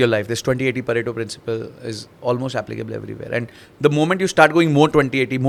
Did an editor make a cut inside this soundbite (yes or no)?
no